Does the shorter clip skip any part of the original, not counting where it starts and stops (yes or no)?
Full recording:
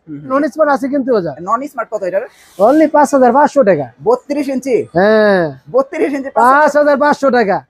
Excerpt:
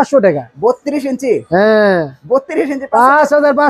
no